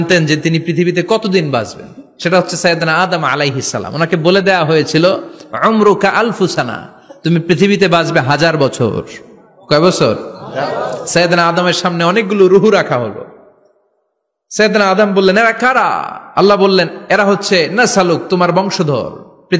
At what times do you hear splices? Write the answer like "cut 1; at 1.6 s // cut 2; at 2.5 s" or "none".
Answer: none